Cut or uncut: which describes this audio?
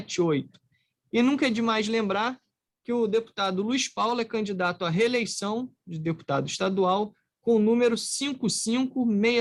uncut